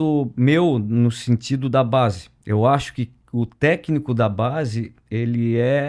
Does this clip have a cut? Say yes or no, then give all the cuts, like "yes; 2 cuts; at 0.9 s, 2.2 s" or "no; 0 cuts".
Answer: no; 0 cuts